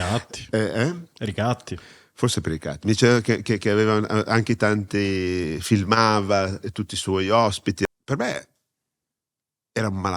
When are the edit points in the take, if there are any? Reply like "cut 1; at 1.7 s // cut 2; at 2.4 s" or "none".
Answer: cut 1; at 7.9 s